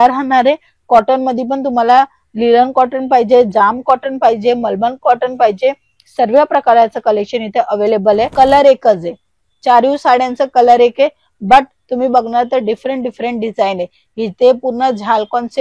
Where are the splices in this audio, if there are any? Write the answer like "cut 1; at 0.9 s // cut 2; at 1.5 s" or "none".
cut 1; at 8.3 s